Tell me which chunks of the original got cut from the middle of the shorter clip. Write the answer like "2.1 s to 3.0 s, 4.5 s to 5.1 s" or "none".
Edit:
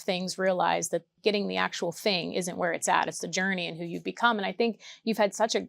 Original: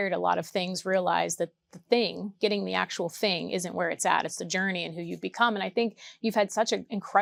1.6 s to 2.3 s